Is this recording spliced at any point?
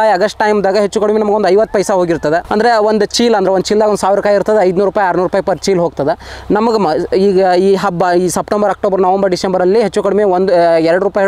no; 0 cuts

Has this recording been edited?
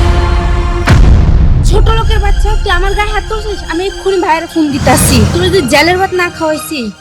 no; 0 cuts

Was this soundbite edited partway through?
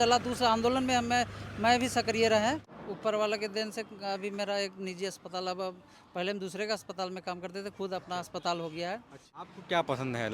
yes; 2 cuts; at 2.7 s, 9.4 s

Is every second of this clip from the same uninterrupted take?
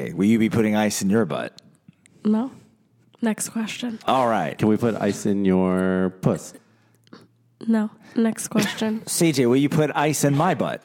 no; 1 cut; at 4.0 s

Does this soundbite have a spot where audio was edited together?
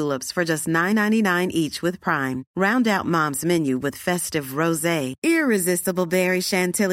no; 0 cuts

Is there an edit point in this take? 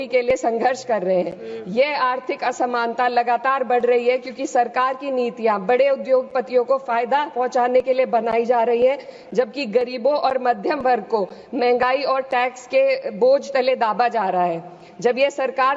no; 0 cuts

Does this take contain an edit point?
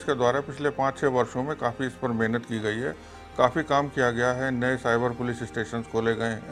no; 0 cuts

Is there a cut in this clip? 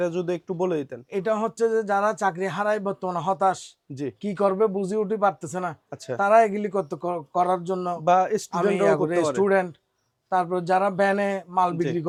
no; 0 cuts

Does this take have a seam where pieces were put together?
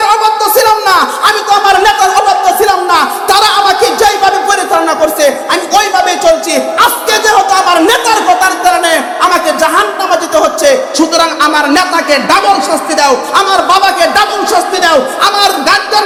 no; 0 cuts

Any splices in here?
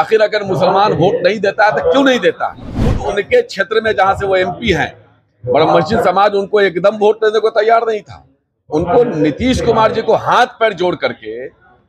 yes; 1 cut; at 3.0 s

